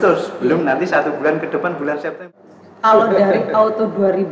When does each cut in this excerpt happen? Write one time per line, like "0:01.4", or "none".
0:02.3